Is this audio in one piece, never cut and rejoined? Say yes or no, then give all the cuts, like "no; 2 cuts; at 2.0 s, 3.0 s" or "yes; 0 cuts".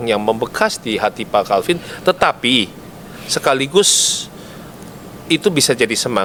yes; 0 cuts